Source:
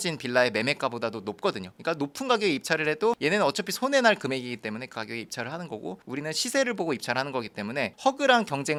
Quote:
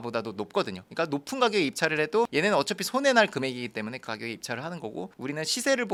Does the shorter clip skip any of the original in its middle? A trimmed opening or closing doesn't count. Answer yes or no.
no